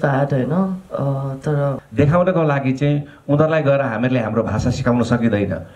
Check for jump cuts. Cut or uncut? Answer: cut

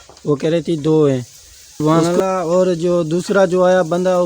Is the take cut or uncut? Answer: cut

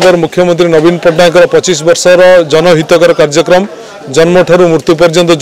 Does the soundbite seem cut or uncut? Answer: uncut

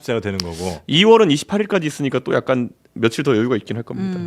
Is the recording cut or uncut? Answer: uncut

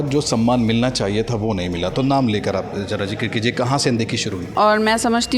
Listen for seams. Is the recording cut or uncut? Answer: cut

